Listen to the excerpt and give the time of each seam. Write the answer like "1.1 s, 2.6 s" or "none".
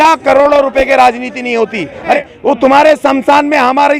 2.2 s